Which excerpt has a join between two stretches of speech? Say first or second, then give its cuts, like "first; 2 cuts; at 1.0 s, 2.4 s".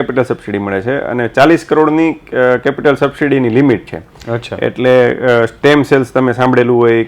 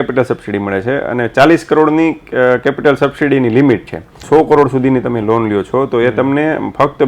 second; 1 cut; at 4.2 s